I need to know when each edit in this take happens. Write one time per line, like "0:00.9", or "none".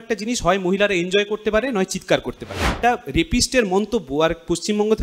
0:02.7